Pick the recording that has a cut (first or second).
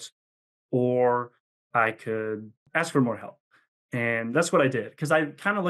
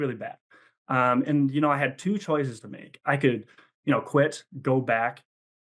first